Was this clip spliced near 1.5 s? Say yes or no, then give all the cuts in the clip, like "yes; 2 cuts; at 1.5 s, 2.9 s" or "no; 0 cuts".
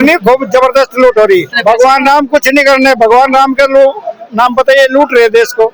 yes; 1 cut; at 1.5 s